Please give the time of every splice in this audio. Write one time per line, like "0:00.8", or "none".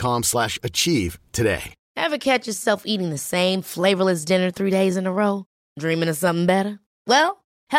none

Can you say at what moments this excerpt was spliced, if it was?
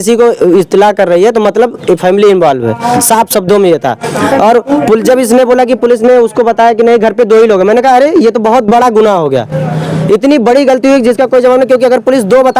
none

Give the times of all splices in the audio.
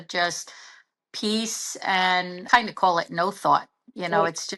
0:00.9
0:02.5

